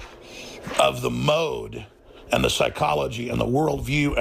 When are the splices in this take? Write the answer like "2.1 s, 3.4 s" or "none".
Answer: none